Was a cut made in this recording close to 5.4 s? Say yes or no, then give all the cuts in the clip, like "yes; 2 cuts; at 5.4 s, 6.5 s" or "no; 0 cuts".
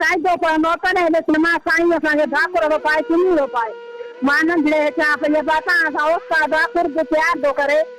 no; 1 cut; at 1.3 s